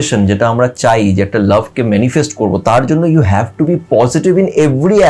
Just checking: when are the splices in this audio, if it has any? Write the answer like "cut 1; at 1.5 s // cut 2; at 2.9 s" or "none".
none